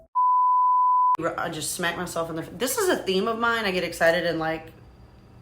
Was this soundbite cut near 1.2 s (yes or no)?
yes